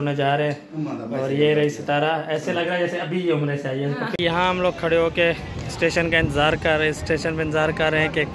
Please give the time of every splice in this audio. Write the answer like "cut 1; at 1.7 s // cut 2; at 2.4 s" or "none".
cut 1; at 4.1 s

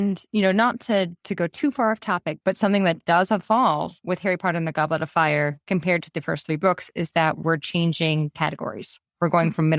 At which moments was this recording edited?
cut 1; at 2.3 s

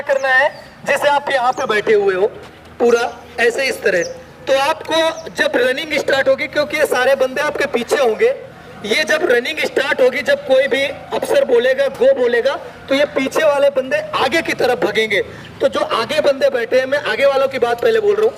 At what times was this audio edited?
none

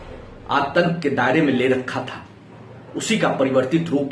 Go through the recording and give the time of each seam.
none

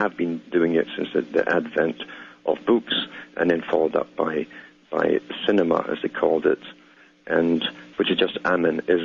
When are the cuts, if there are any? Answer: none

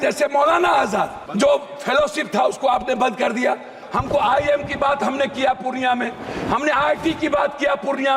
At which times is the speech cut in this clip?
cut 1; at 1.2 s // cut 2; at 3.8 s

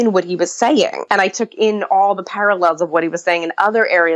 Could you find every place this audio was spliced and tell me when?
cut 1; at 1.0 s

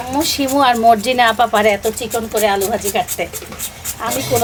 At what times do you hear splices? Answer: none

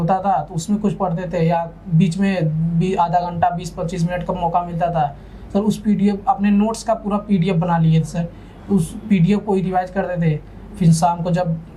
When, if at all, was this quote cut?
none

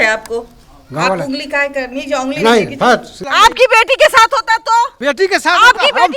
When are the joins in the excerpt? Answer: cut 1; at 3.2 s // cut 2; at 5.0 s

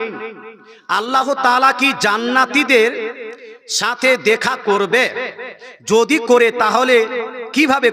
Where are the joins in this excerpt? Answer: none

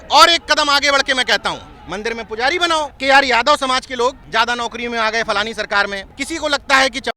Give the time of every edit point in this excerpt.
cut 1; at 2.9 s // cut 2; at 4.2 s // cut 3; at 6.1 s

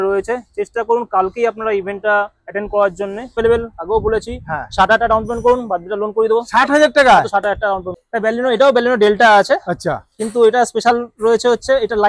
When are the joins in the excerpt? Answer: cut 1; at 3.4 s // cut 2; at 7.9 s

